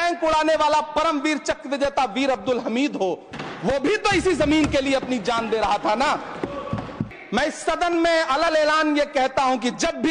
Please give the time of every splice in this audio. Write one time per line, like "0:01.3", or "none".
0:07.1